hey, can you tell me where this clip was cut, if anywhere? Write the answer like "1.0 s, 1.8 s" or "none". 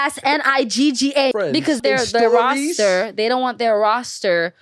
1.7 s